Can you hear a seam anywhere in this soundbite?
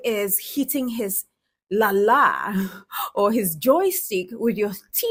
no; 0 cuts

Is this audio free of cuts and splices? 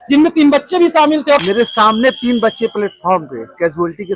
no; 1 cut; at 1.4 s

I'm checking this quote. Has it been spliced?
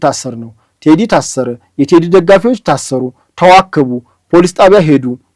no; 0 cuts

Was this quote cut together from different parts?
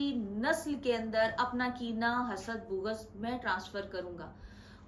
no; 0 cuts

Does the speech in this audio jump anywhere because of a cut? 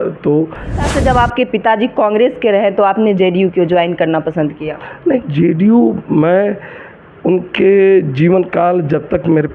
yes; 1 cut; at 0.9 s

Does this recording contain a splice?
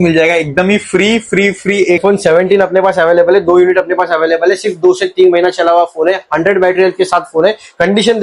yes; 1 cut; at 2.0 s

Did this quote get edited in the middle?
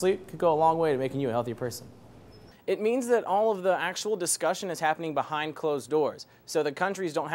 yes; 1 cut; at 2.5 s

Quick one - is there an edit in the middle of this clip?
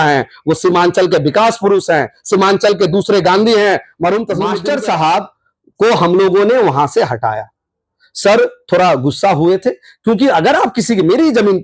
yes; 1 cut; at 4.5 s

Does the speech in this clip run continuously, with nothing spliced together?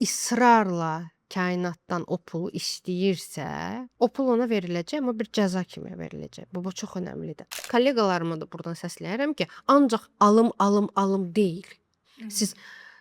no; 1 cut; at 7.6 s

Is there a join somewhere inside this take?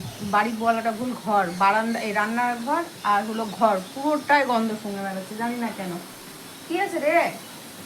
no; 0 cuts

